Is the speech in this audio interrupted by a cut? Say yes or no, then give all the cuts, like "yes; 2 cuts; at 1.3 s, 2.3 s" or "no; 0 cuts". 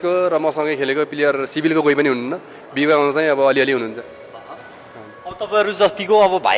no; 0 cuts